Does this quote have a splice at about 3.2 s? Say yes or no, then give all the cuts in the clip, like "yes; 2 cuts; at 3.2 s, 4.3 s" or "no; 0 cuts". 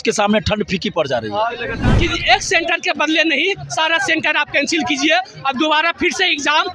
no; 1 cut; at 1.8 s